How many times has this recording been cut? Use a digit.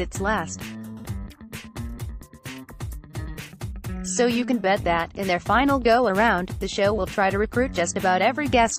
2